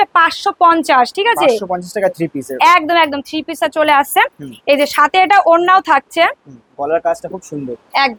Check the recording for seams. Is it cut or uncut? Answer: uncut